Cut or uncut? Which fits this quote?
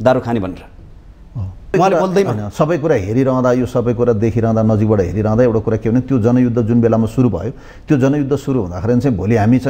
cut